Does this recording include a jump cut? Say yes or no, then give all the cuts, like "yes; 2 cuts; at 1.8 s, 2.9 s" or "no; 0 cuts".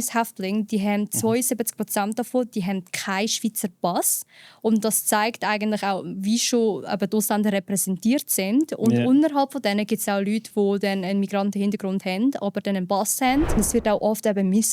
yes; 1 cut; at 13.6 s